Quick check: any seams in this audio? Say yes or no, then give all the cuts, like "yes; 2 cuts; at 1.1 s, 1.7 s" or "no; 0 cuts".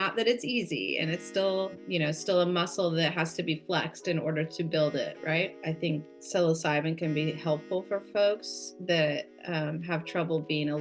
yes; 1 cut; at 5.5 s